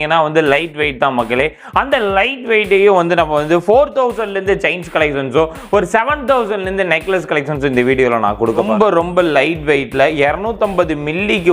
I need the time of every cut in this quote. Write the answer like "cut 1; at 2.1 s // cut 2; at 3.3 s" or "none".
cut 1; at 8.7 s